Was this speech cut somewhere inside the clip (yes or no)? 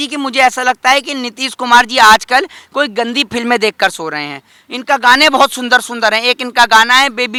no